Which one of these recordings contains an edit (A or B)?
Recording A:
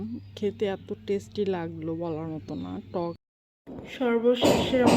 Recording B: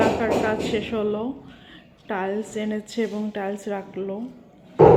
A